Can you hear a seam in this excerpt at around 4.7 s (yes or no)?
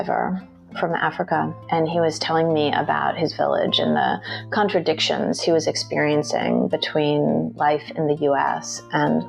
no